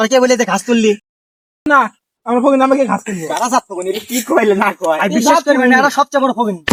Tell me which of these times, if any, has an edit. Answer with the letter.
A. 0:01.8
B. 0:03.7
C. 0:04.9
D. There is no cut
D